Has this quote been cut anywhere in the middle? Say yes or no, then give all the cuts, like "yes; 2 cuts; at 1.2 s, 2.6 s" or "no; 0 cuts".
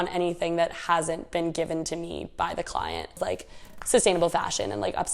yes; 1 cut; at 3.2 s